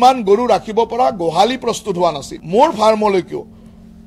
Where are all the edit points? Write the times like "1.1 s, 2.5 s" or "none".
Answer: 2.3 s